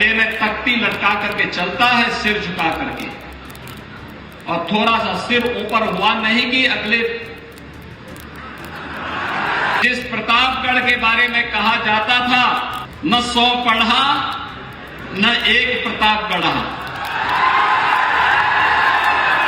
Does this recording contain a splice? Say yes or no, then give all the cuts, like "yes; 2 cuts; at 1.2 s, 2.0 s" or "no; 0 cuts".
yes; 2 cuts; at 9.8 s, 12.8 s